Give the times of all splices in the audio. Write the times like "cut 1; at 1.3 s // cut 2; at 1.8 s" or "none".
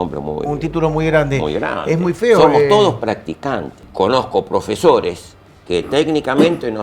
cut 1; at 3.9 s